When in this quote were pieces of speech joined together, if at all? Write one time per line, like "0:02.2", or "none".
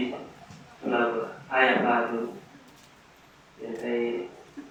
none

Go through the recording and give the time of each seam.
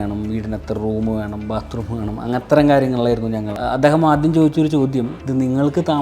0:03.5

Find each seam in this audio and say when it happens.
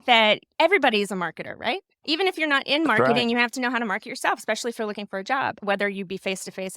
0:02.0
0:05.6

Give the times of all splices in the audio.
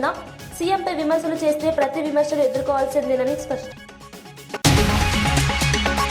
0:03.7

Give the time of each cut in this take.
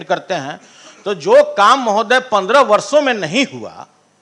none

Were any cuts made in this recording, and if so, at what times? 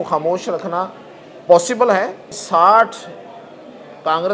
0:02.3

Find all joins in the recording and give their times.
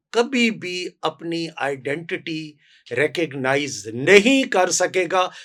none

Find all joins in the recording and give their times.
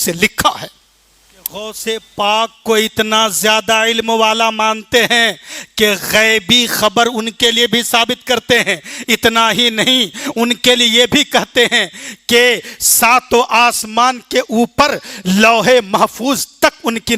0:01.5

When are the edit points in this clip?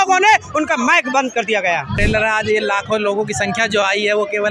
0:01.9

